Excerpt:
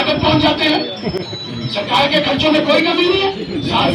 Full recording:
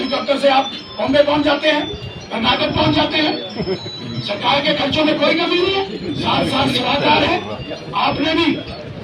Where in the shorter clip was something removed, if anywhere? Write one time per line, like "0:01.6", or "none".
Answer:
none